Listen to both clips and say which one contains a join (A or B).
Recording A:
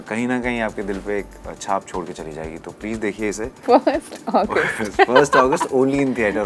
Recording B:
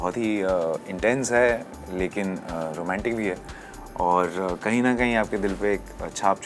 A